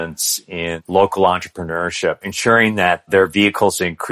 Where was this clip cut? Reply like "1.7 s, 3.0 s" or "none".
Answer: 0.8 s, 2.3 s